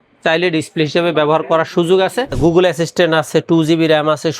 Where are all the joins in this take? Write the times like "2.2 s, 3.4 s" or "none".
2.3 s